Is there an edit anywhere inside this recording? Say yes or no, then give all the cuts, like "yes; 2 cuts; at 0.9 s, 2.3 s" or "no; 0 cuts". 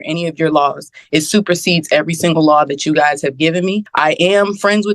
yes; 1 cut; at 3.9 s